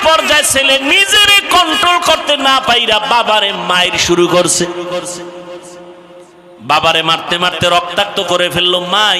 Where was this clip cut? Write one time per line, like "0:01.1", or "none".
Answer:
0:06.2